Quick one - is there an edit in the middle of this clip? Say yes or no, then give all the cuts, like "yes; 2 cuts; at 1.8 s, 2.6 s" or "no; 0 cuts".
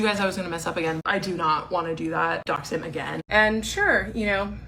yes; 2 cuts; at 1.0 s, 3.2 s